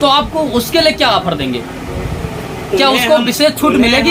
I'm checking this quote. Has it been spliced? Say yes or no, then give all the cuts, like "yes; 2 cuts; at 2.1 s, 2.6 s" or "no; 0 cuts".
no; 0 cuts